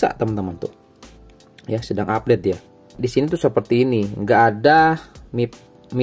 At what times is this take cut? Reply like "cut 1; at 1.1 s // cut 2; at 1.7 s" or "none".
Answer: cut 1; at 3.0 s